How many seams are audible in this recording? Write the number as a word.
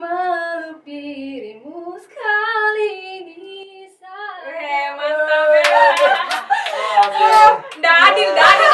zero